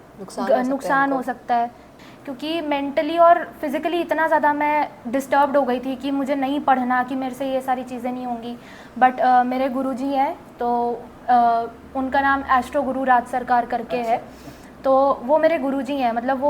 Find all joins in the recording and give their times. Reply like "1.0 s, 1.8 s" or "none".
1.9 s